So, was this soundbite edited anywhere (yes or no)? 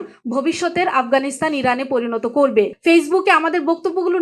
yes